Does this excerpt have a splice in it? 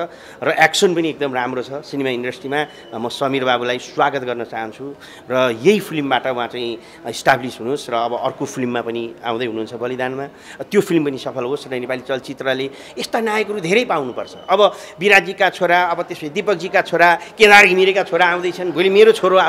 no; 0 cuts

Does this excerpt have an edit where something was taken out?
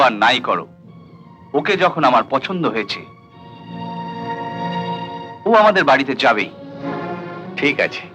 no; 0 cuts

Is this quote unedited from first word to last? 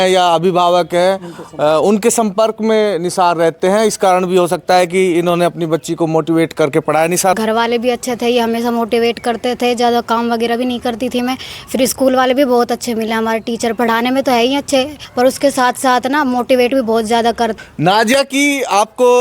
no; 3 cuts; at 7.4 s, 15.0 s, 17.5 s

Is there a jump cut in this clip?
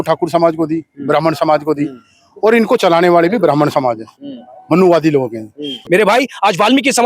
yes; 1 cut; at 5.7 s

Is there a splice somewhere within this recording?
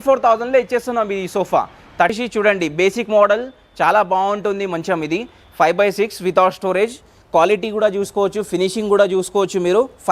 yes; 1 cut; at 2.2 s

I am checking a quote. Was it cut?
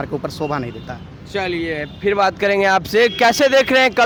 no; 0 cuts

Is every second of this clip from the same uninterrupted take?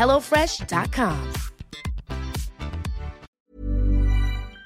no; 1 cut; at 3.3 s

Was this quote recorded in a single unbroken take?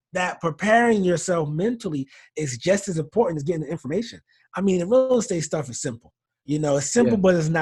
yes; 0 cuts

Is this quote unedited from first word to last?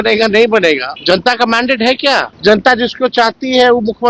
no; 2 cuts; at 0.9 s, 2.3 s

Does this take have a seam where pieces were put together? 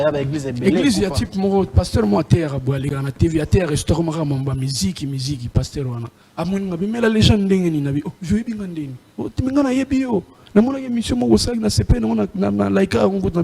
yes; 1 cut; at 6.1 s

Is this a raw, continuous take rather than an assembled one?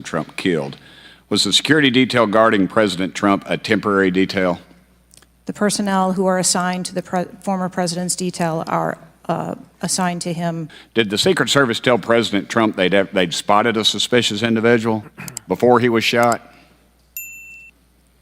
no; 1 cut; at 10.7 s

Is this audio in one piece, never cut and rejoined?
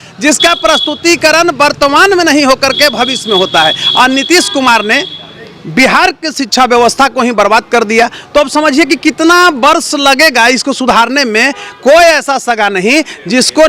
yes; 0 cuts

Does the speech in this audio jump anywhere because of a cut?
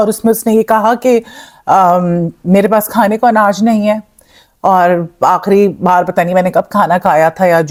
no; 0 cuts

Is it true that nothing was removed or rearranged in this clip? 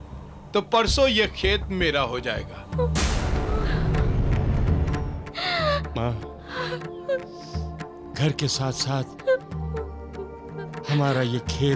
no; 1 cut; at 5.1 s

